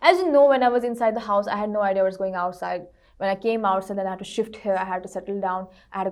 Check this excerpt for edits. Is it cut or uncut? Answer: uncut